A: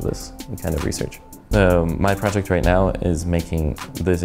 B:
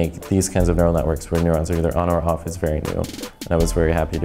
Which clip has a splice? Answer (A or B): A